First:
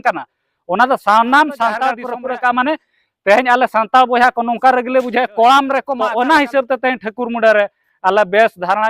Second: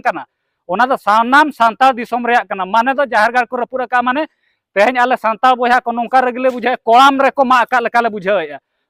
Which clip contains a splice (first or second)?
first